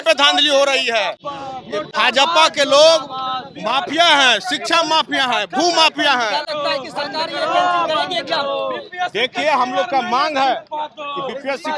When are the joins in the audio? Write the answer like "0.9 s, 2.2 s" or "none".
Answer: none